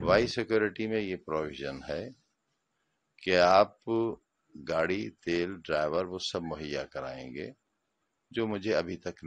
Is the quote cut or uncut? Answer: uncut